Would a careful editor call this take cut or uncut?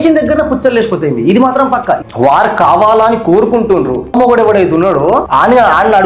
cut